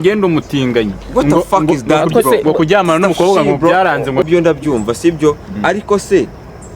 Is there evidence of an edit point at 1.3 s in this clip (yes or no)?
no